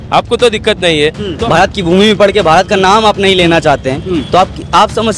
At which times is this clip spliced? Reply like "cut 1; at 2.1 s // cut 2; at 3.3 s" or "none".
cut 1; at 1.3 s